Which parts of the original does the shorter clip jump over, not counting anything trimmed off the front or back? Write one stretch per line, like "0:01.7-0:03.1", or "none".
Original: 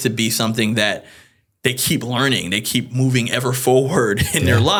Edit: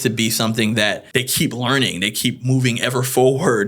0:01.0-0:01.5